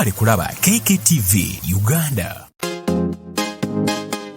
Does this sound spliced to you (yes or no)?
yes